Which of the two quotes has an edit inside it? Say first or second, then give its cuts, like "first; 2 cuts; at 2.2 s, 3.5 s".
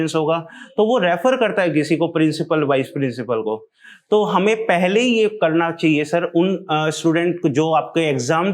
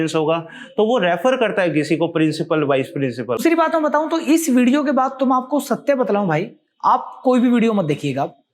second; 1 cut; at 3.4 s